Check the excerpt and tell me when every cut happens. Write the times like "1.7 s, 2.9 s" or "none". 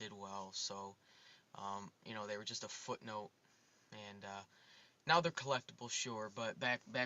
5.7 s